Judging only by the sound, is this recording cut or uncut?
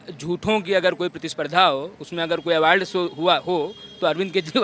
uncut